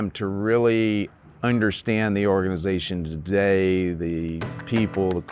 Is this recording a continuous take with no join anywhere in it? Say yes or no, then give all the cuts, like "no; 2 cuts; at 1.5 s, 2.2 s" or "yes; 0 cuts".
yes; 0 cuts